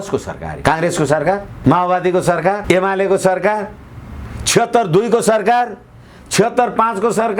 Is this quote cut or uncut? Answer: uncut